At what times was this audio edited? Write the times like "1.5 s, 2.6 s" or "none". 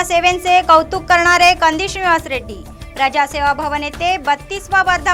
none